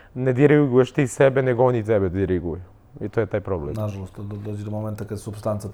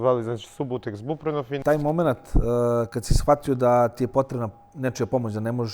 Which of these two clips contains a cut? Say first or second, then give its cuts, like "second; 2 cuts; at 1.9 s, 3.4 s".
second; 1 cut; at 1.6 s